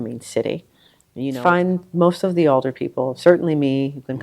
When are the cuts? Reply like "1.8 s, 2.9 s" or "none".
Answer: 1.3 s